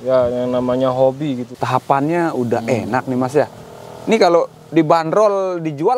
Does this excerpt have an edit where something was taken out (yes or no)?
yes